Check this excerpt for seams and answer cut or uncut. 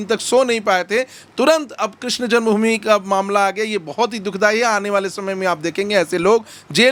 uncut